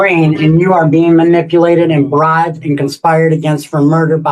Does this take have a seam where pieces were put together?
no; 0 cuts

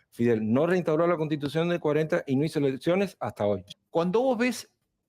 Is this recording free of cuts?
no; 1 cut; at 3.6 s

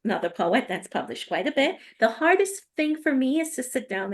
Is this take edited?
yes; 1 cut; at 1.8 s

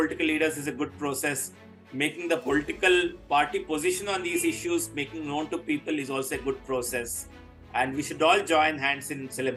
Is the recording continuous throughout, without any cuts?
yes; 0 cuts

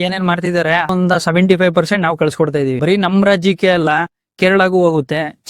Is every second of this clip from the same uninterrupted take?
no; 2 cuts; at 0.9 s, 2.8 s

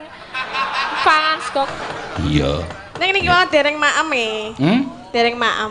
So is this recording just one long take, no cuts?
no; 1 cut; at 1.7 s

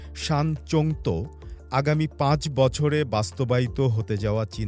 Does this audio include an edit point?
no; 0 cuts

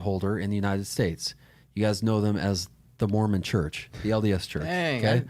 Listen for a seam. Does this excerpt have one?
no; 0 cuts

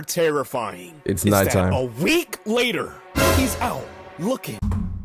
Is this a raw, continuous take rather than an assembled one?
yes; 0 cuts

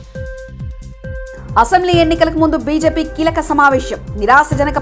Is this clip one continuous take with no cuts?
no; 1 cut; at 1.4 s

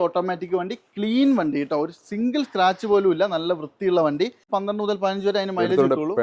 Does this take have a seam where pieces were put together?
yes; 1 cut; at 4.4 s

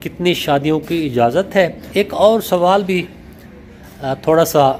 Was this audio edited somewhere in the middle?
yes; 1 cut; at 1.9 s

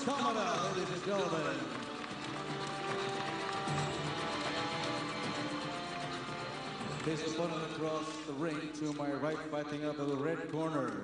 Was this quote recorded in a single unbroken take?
yes; 0 cuts

